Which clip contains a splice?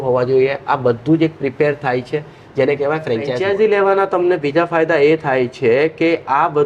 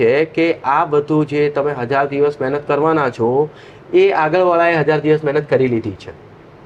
first; 1 cut; at 3.4 s

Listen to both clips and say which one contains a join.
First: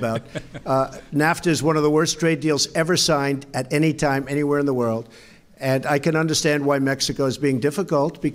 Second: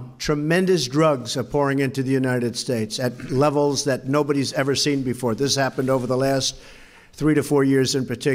first; 1 cut; at 5.4 s

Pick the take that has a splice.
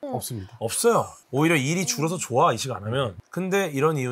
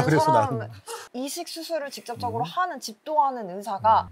second; 1 cut; at 1.1 s

